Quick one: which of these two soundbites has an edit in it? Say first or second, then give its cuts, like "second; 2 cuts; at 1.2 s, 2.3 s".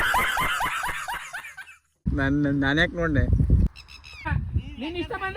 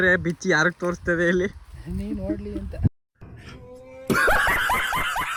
first; 1 cut; at 3.7 s